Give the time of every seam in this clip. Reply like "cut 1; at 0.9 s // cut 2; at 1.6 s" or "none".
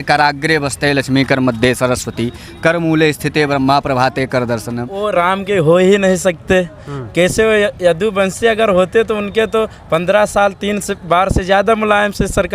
cut 1; at 4.9 s

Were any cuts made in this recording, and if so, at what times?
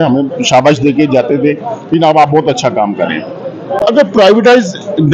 none

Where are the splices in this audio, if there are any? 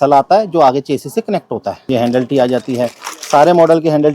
cut 1; at 1.7 s // cut 2; at 3.1 s

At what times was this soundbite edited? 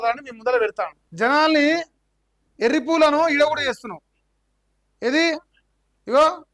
cut 1; at 1.0 s

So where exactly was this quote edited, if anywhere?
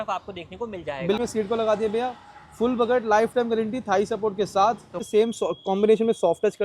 cut 1; at 1.2 s // cut 2; at 5.0 s

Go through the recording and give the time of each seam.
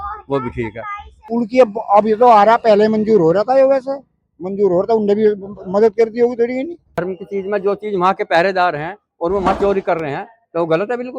cut 1; at 1.3 s // cut 2; at 7.0 s

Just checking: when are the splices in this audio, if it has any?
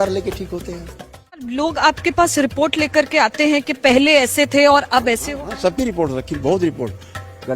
cut 1; at 1.5 s

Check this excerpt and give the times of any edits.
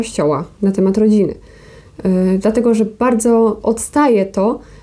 none

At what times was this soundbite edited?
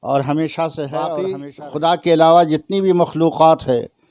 cut 1; at 1.4 s

